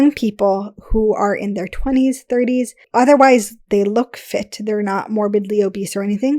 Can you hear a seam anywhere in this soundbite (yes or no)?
no